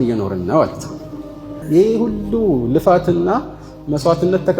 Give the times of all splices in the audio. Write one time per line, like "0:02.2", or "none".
0:01.5